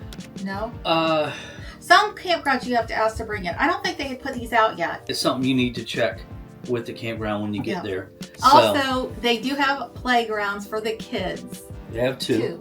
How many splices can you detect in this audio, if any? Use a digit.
2